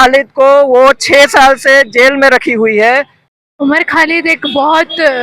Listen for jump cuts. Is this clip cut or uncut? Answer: cut